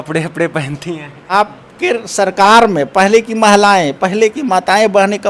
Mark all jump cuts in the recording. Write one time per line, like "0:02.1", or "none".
0:01.3